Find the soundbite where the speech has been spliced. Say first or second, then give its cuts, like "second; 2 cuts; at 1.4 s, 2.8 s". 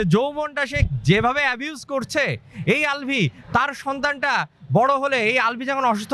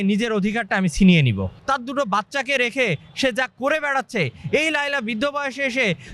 second; 1 cut; at 1.5 s